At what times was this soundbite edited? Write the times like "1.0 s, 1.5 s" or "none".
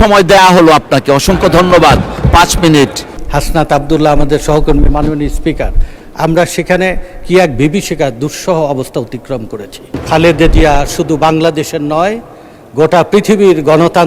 3.2 s, 10.0 s